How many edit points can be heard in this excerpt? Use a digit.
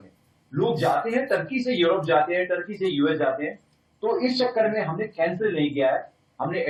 0